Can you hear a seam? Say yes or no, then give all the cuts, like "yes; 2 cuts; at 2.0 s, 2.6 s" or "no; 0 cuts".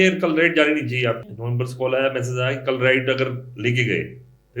yes; 1 cut; at 1.4 s